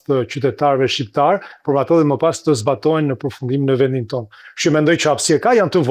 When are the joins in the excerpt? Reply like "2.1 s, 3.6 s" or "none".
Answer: none